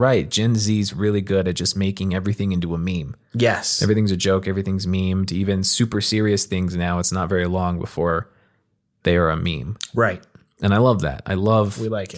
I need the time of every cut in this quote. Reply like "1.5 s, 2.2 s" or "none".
none